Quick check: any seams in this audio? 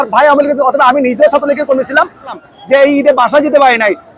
yes; 1 cut; at 2.5 s

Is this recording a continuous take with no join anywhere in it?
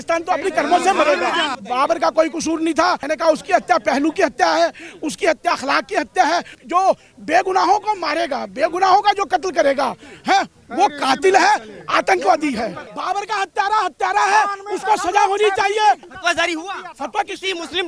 no; 5 cuts; at 1.5 s, 3.0 s, 6.6 s, 12.9 s, 16.1 s

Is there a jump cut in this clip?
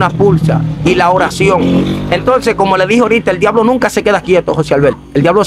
no; 0 cuts

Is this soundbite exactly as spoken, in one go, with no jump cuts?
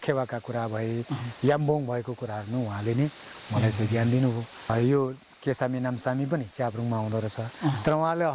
no; 1 cut; at 4.7 s

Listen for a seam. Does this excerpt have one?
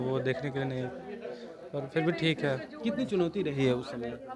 no; 0 cuts

